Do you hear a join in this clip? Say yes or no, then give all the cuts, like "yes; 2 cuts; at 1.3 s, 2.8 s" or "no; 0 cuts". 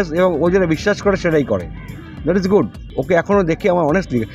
yes; 1 cut; at 2.9 s